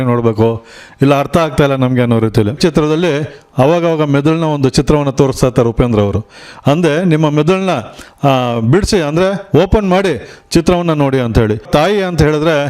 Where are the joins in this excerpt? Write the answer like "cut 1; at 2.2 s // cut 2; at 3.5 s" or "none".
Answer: cut 1; at 2.6 s // cut 2; at 11.7 s